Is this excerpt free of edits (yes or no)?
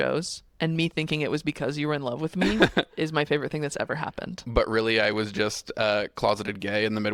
yes